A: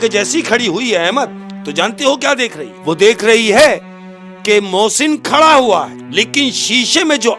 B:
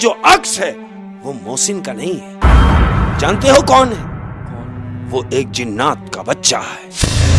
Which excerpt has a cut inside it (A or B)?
A